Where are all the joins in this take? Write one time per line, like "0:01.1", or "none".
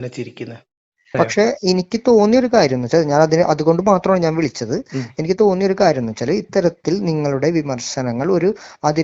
0:01.1